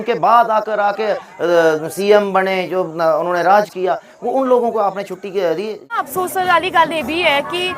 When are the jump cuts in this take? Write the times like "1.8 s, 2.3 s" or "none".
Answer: 5.8 s